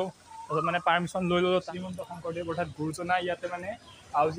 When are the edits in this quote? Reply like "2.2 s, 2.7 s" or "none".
1.7 s